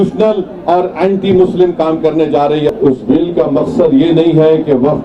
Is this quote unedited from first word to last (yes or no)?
no